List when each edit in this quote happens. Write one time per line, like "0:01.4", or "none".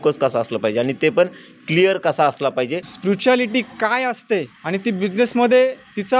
0:02.9
0:04.6